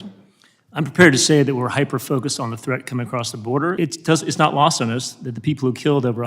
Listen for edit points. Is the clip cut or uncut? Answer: cut